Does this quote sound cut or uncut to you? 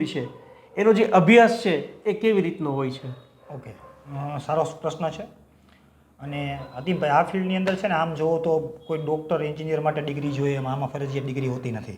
uncut